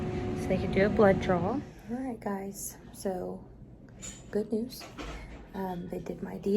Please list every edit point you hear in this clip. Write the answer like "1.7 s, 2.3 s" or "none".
1.8 s